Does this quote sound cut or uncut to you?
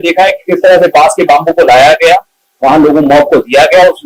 uncut